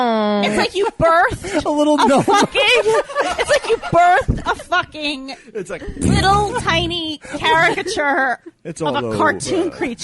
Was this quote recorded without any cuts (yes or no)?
yes